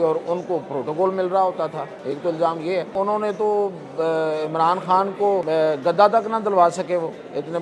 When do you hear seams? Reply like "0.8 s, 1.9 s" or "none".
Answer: 1.9 s, 2.9 s, 5.4 s